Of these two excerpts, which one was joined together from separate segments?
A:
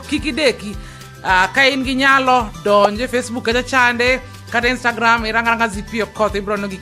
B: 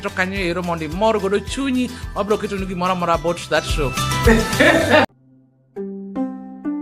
B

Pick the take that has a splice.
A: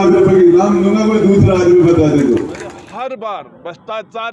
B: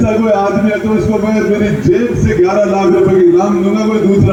A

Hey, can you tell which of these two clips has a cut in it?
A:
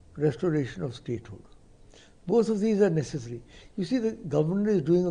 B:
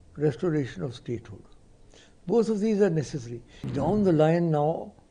B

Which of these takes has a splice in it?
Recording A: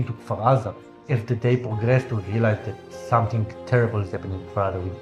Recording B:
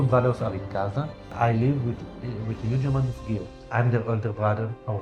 B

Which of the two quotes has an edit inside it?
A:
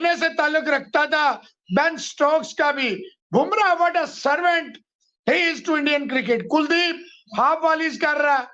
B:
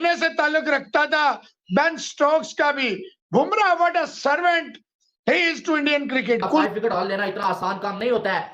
B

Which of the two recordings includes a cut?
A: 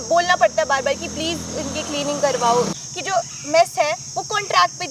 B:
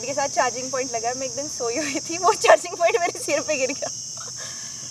A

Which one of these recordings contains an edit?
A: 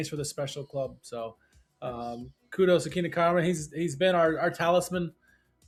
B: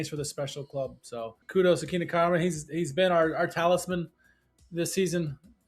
B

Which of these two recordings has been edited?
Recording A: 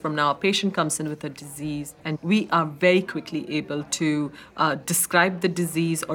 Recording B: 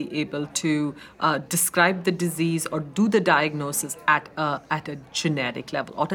A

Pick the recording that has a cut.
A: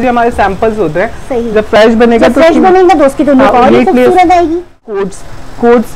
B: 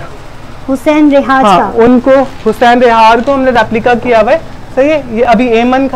A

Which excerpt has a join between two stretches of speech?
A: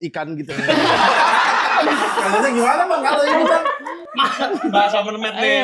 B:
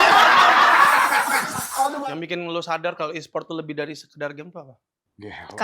B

